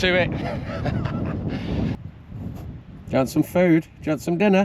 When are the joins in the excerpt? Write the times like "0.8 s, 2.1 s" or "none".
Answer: 2.0 s